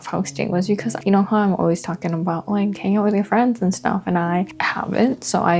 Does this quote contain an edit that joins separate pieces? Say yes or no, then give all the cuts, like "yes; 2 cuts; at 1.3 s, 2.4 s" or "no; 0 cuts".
no; 0 cuts